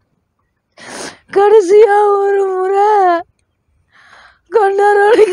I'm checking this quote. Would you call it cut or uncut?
uncut